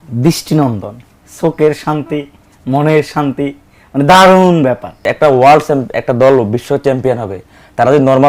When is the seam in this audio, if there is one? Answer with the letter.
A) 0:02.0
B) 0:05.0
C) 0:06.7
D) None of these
B